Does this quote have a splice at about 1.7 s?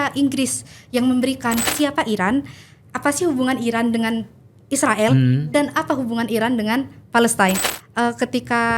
yes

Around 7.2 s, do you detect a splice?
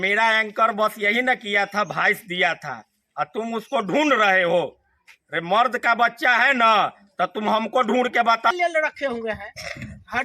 no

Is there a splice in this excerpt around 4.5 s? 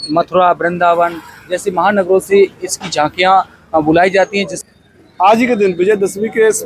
yes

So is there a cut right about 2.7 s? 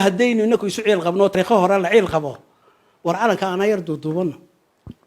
no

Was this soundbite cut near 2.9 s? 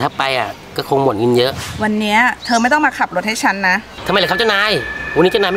no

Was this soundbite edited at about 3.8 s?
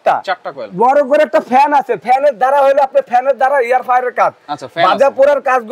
no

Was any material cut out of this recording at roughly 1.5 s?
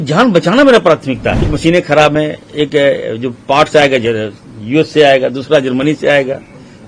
yes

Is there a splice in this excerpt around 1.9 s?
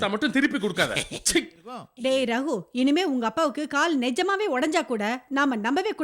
yes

